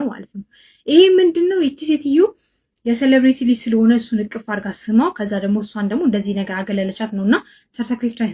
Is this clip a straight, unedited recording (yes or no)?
yes